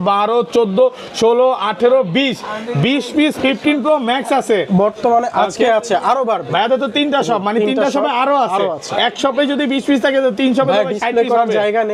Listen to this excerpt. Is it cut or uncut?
uncut